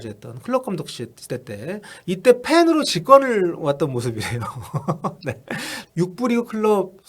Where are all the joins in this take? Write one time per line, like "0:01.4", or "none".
0:05.7